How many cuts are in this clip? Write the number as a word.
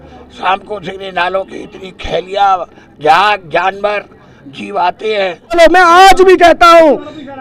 one